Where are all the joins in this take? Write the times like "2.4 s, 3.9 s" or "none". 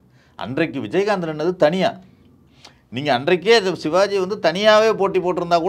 none